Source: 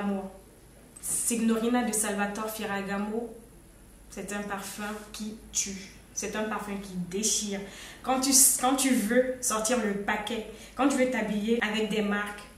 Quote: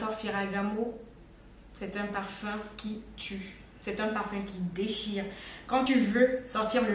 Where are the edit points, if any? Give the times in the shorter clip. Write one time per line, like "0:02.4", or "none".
0:05.9